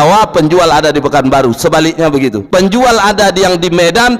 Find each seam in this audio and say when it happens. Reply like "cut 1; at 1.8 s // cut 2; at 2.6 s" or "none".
cut 1; at 2.4 s